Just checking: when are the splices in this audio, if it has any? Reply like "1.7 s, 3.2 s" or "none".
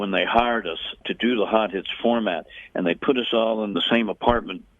1.0 s, 3.7 s